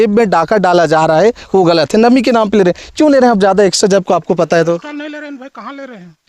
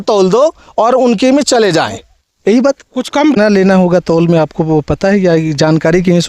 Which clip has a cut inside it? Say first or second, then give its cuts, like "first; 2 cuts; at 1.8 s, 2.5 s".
second; 1 cut; at 3.3 s